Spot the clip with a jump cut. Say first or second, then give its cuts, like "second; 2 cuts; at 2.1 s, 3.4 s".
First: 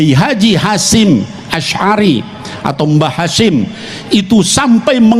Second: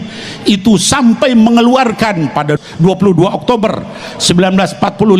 second; 1 cut; at 2.5 s